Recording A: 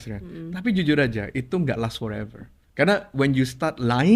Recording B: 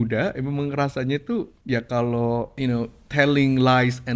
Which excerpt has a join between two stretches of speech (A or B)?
B